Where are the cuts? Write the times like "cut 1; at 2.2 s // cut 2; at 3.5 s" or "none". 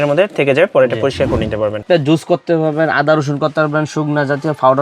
cut 1; at 1.8 s